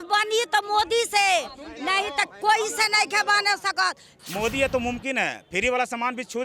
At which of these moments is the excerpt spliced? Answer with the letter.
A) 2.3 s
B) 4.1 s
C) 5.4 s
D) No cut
B